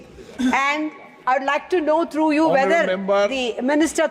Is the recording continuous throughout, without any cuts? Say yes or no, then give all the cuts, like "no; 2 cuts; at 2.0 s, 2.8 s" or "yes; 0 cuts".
yes; 0 cuts